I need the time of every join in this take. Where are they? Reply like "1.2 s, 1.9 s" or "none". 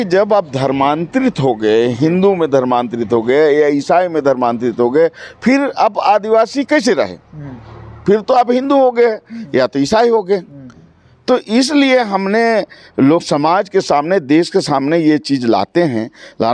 none